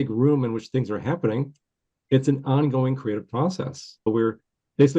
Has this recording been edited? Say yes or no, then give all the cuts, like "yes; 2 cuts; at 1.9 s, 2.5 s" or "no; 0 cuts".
yes; 1 cut; at 4.1 s